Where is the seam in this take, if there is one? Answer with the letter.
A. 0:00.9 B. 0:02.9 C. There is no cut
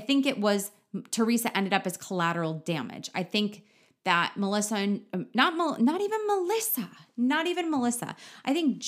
C